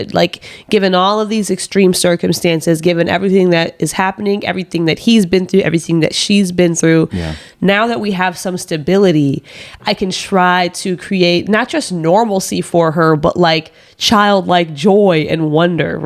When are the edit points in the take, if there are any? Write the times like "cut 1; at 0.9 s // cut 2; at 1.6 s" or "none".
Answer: none